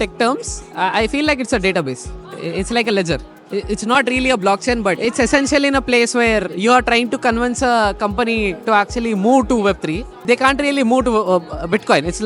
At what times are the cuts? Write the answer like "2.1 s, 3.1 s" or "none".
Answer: 5.0 s